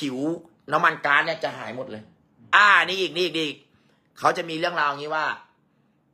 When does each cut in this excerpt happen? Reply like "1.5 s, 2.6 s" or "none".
2.4 s